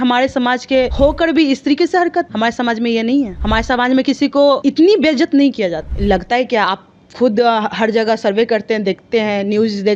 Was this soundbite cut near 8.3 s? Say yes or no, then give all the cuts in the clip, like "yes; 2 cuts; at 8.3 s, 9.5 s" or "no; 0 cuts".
no; 5 cuts; at 0.9 s, 2.3 s, 3.4 s, 4.6 s, 5.9 s